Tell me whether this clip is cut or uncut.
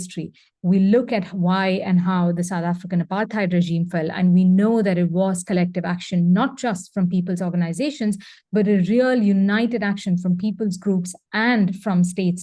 uncut